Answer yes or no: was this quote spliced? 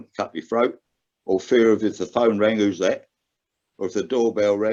no